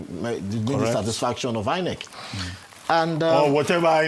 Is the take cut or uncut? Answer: uncut